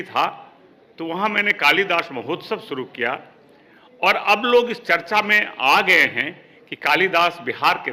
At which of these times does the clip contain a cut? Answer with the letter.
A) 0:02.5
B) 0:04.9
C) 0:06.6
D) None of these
D